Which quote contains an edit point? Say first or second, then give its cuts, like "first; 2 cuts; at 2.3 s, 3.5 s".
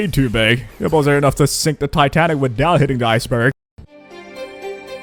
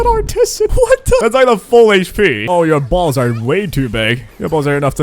second; 2 cuts; at 1.2 s, 2.5 s